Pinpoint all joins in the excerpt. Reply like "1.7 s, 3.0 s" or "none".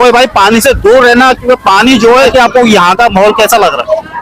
2.3 s

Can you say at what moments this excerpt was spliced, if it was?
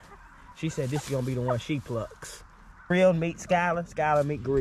2.9 s

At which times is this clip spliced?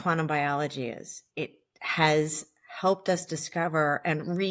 1.2 s

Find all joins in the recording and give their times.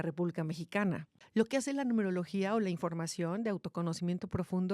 1.1 s

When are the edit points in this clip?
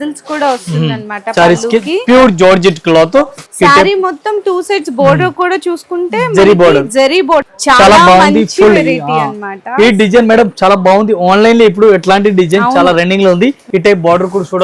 3.4 s, 7.5 s, 13.6 s

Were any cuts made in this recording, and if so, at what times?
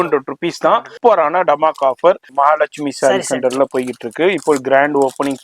0.9 s, 2.3 s

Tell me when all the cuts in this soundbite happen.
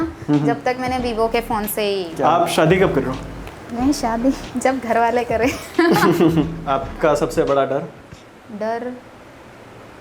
2.1 s, 6.6 s

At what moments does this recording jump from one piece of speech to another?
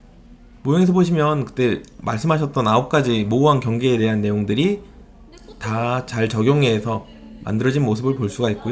none

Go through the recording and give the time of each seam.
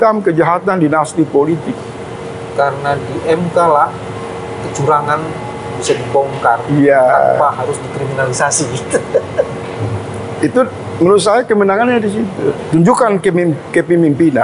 12.6 s

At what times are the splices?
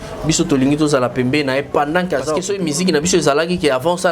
2.5 s

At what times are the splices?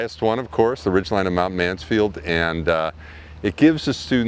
none

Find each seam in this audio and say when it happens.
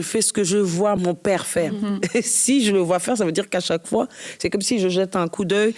1.0 s

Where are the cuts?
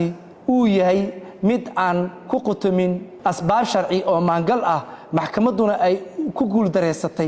3.1 s

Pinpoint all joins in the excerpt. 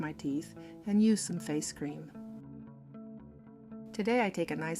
2.1 s, 3.9 s

